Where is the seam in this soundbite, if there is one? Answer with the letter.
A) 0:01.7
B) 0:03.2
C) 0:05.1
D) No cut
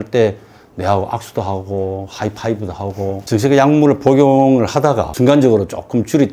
B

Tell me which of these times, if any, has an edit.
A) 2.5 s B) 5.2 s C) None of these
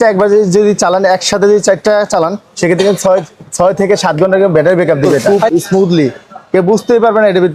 B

